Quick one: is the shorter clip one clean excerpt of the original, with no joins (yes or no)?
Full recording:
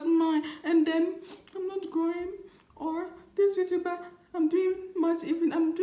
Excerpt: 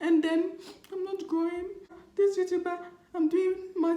no